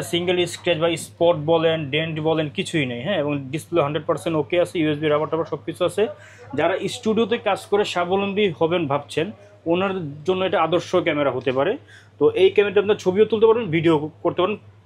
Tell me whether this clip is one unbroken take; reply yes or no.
yes